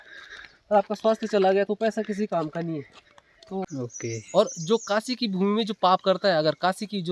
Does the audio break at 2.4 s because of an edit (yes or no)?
no